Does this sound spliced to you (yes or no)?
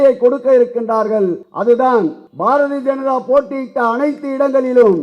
yes